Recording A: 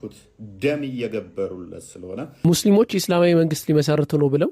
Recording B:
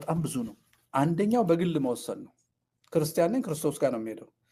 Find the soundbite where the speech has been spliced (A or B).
A